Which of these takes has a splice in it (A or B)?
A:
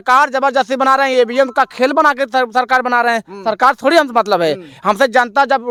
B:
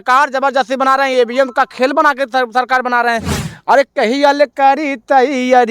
B